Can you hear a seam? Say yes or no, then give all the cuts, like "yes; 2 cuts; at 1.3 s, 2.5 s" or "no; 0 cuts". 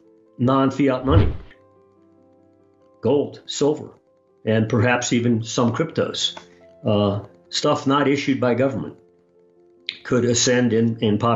no; 0 cuts